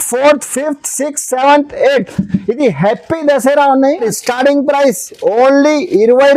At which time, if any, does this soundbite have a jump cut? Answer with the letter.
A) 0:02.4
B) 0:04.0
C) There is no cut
B